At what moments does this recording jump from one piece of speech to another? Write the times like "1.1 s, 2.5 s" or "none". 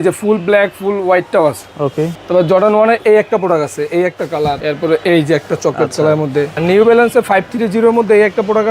2.2 s, 4.6 s, 6.5 s